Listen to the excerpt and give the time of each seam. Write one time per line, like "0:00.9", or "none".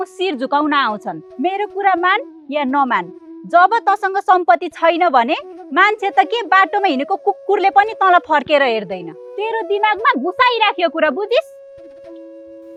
none